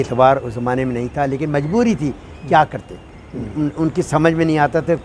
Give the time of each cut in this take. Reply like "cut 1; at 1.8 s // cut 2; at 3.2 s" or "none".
none